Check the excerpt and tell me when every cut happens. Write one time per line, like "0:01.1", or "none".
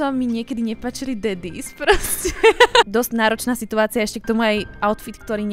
0:02.9